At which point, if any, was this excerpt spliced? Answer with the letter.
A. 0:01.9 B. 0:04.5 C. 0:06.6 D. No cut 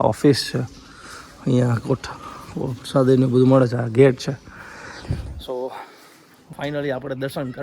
C